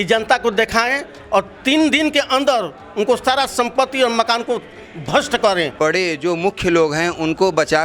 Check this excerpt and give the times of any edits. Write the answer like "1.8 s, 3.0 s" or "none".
5.7 s